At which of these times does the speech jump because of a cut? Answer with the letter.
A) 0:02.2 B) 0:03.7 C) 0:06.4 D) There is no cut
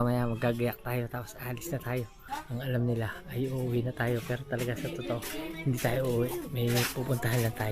A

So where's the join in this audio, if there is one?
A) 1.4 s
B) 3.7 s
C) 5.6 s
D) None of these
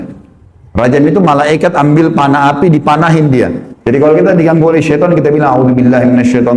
D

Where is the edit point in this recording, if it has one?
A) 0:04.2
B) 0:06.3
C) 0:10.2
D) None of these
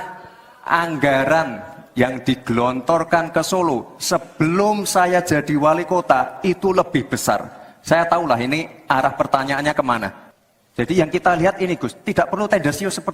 C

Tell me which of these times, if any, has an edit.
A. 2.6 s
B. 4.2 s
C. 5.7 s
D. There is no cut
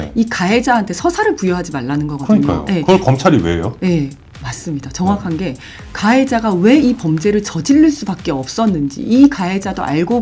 D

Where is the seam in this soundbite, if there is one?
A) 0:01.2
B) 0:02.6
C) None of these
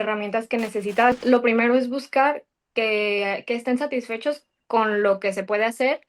A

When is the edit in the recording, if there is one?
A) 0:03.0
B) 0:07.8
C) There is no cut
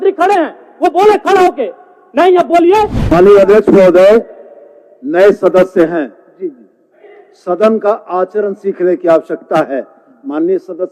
A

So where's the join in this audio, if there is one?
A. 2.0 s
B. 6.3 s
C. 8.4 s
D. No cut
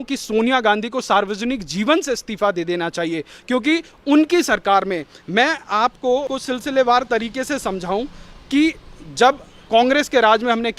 B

